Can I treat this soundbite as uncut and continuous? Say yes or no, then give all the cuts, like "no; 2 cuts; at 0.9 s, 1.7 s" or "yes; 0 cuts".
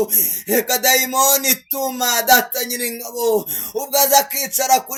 yes; 0 cuts